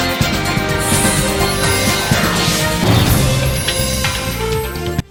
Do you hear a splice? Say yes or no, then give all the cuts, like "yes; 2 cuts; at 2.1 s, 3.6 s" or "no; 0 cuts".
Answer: no; 0 cuts